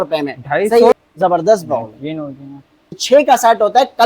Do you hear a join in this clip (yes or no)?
yes